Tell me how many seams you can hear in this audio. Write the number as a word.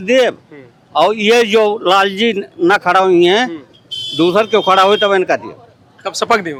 zero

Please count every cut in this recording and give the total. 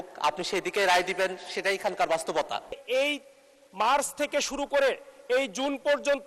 one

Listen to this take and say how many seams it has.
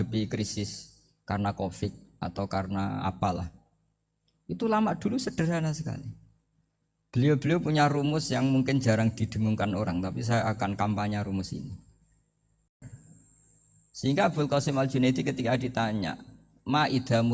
one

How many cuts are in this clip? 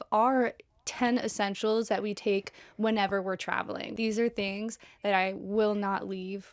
one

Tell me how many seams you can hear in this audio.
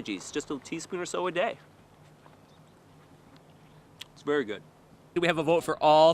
one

